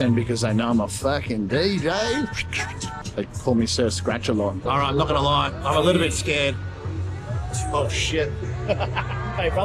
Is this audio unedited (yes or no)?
no